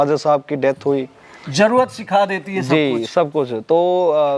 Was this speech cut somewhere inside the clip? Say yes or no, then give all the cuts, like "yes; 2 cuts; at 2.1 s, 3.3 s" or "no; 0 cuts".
no; 0 cuts